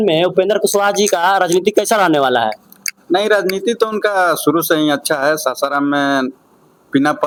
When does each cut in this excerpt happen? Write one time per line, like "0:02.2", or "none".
none